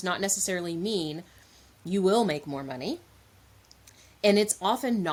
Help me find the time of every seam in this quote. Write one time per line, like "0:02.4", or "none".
none